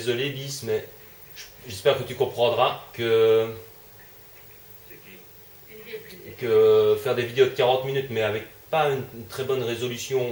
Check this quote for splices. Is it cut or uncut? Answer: cut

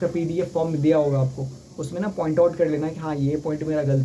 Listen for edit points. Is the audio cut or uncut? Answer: uncut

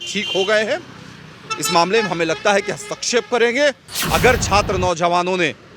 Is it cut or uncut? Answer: cut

